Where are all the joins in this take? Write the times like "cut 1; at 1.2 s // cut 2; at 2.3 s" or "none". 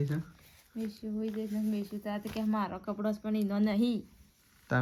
none